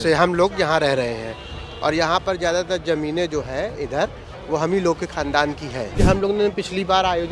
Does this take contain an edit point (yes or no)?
yes